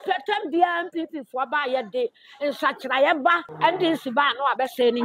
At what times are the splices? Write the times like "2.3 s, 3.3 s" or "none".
3.5 s